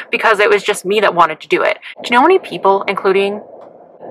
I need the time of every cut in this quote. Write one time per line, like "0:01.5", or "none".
none